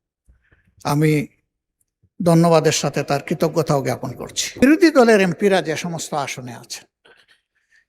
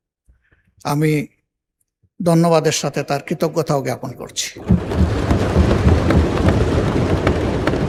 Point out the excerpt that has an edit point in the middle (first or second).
first